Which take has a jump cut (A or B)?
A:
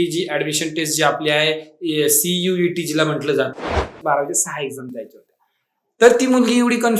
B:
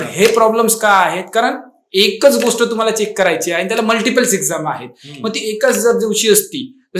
A